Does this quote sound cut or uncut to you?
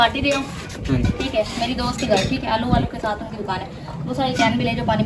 uncut